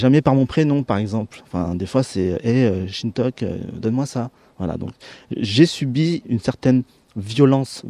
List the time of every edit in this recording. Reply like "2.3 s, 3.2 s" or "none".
4.6 s